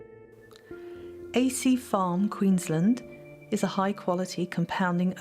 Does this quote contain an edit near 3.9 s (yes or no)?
no